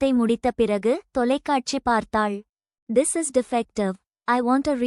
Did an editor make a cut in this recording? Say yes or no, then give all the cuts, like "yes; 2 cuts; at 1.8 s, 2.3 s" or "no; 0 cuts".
yes; 1 cut; at 2.8 s